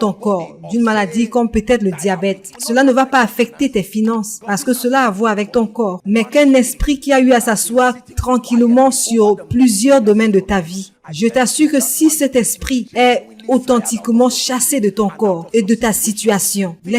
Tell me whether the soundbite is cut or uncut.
cut